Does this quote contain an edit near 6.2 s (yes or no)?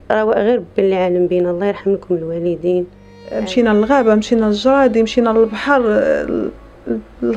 no